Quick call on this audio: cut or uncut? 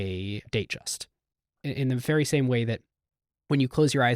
cut